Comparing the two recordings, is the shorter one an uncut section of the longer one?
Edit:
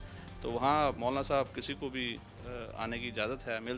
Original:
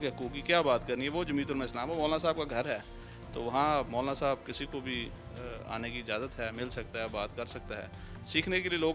yes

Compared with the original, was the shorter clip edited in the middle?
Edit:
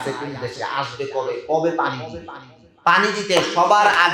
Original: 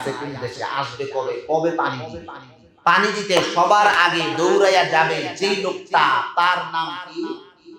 no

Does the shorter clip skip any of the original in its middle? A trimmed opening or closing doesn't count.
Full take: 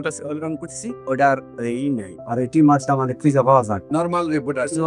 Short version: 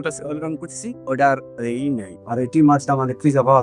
no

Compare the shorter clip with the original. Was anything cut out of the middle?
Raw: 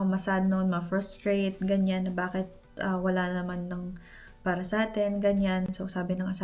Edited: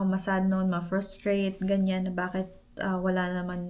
no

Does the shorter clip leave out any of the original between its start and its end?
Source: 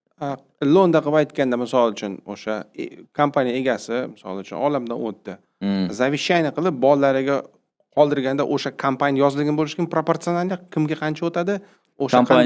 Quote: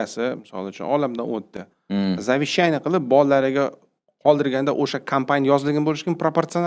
no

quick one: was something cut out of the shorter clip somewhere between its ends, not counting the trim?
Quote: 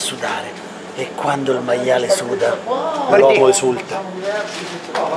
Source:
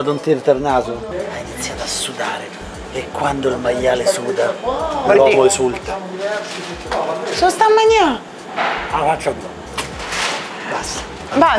no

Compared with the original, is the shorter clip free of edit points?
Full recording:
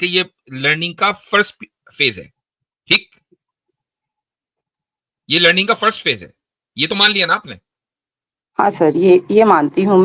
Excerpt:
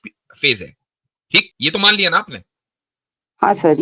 no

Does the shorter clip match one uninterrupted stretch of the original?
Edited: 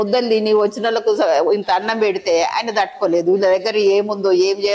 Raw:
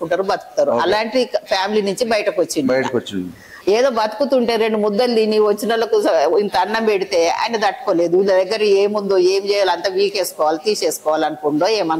yes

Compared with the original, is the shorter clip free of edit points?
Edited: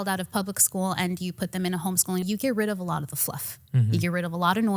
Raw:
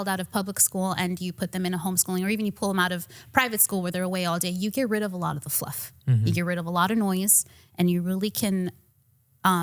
no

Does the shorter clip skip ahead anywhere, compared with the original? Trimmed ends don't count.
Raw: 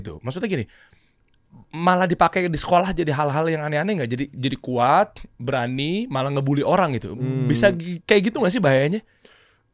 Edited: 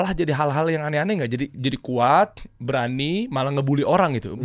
no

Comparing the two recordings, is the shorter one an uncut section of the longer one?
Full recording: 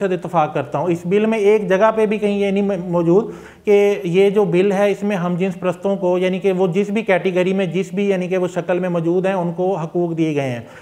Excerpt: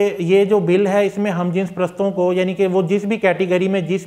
yes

